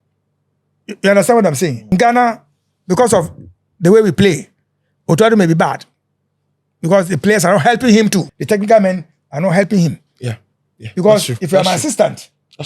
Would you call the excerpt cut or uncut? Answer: cut